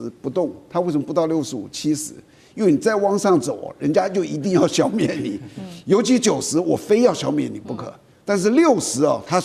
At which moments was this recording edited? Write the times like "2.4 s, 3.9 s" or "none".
none